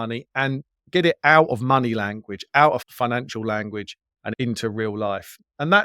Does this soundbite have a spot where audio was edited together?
yes; 1 cut; at 4.3 s

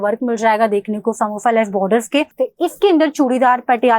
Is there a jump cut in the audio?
yes; 1 cut; at 2.4 s

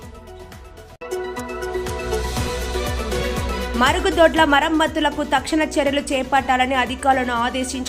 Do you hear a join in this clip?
yes; 2 cuts; at 1.0 s, 3.7 s

